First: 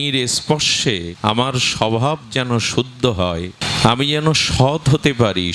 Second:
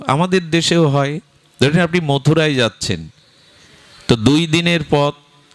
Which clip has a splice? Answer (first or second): first